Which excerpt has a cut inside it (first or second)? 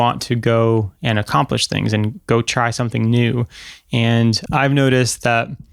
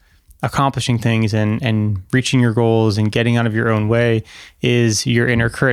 first